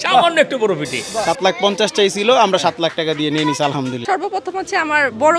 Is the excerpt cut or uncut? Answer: cut